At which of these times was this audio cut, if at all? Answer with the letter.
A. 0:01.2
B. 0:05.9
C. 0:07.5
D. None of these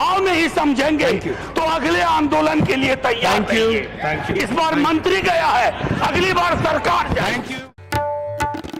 C